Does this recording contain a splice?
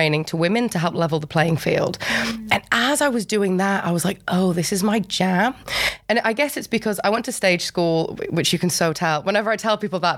no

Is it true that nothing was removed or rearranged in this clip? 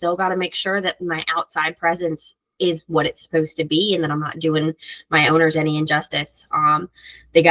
yes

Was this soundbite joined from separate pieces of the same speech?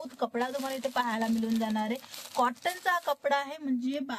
no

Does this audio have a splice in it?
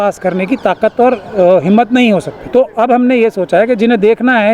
yes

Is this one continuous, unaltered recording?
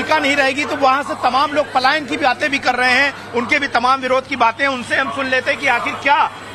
yes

